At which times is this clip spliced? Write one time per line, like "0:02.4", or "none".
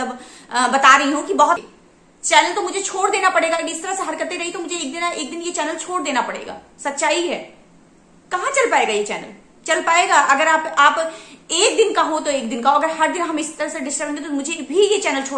0:01.6